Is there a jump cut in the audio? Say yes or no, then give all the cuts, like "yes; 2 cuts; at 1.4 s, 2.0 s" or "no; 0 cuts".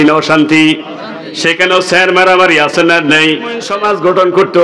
yes; 1 cut; at 3.7 s